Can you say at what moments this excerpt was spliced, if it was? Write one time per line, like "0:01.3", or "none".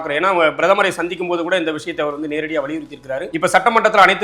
0:03.3